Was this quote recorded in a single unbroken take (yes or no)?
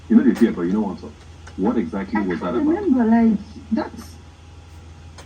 yes